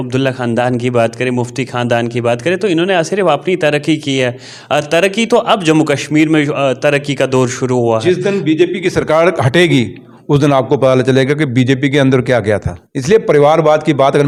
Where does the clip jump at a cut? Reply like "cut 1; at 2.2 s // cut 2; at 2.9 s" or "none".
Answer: none